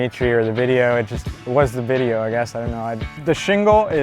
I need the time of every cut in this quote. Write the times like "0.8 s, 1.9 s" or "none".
3.1 s